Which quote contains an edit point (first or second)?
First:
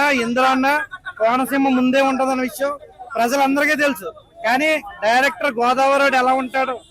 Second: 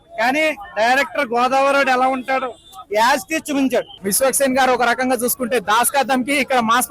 second